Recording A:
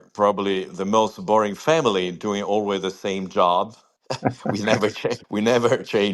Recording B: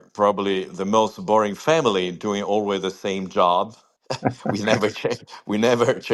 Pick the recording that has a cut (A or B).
A